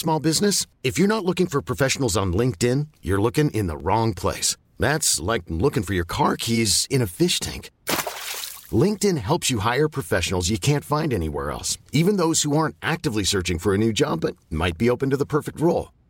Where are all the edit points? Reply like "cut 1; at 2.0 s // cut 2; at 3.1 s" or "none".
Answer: none